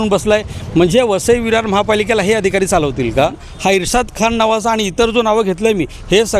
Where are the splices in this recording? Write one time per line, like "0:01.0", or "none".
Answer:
0:03.4